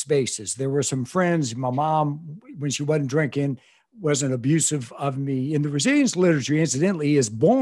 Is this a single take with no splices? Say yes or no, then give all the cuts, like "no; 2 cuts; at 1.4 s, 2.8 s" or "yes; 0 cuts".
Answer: yes; 0 cuts